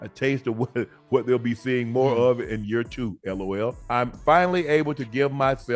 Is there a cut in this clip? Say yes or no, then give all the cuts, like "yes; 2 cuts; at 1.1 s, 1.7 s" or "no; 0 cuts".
no; 0 cuts